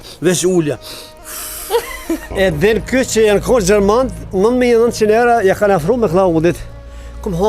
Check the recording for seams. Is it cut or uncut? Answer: cut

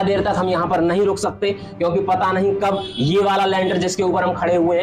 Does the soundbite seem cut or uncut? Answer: uncut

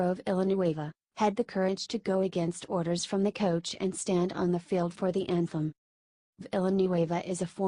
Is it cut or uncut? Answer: uncut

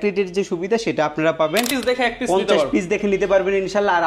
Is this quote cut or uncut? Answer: cut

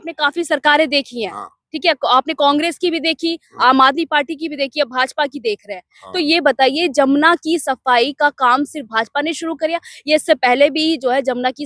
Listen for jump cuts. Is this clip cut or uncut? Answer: uncut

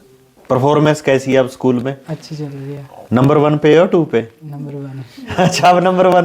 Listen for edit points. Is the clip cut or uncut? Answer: uncut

